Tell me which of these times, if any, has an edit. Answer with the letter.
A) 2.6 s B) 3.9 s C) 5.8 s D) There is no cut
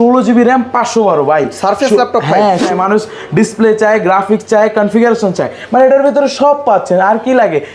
A